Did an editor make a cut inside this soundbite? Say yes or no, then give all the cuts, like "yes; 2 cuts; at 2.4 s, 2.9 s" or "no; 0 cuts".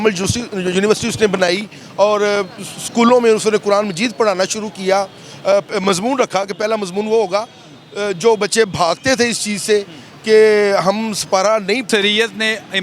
yes; 1 cut; at 11.8 s